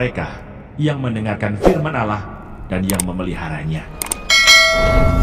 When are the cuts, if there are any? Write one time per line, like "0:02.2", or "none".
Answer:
none